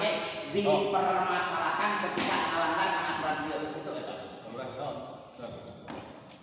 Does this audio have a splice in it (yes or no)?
no